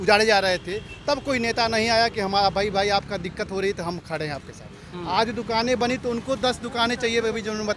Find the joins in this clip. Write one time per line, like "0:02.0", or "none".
none